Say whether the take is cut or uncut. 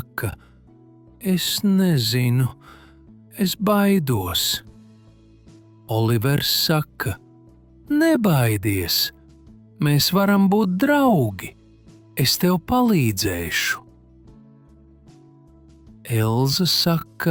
uncut